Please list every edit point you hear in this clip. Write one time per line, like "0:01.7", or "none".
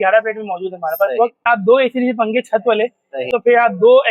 0:01.5
0:03.2